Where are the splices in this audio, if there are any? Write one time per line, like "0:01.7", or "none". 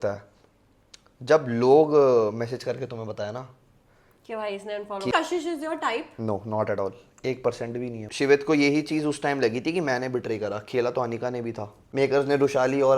0:05.1
0:08.0
0:11.7